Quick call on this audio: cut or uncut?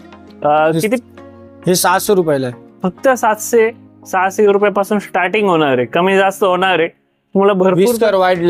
uncut